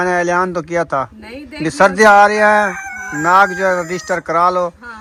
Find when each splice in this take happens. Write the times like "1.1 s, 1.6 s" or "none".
none